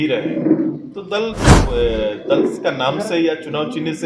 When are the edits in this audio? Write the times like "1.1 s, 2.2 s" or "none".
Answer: 1.5 s